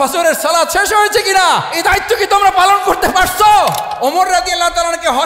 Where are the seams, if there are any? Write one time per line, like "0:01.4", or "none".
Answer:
0:01.7
0:03.9